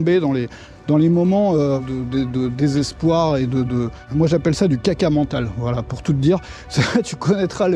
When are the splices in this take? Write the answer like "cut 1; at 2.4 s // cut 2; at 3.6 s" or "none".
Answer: cut 1; at 1.8 s // cut 2; at 4.0 s